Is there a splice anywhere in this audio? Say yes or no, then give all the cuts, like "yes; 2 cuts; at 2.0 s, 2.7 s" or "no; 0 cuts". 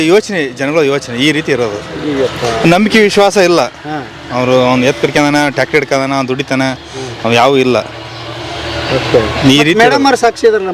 no; 0 cuts